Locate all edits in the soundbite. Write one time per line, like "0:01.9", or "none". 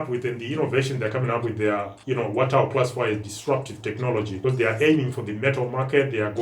0:04.3